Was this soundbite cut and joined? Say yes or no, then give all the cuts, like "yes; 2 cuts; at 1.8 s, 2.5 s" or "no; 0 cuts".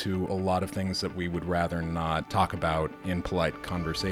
yes; 2 cuts; at 2.3 s, 3.0 s